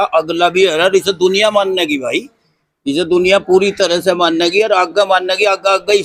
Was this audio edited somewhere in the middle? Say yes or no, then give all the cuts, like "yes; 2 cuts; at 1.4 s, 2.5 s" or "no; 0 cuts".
no; 0 cuts